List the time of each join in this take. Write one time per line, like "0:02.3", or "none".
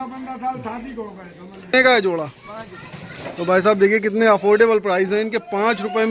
0:01.7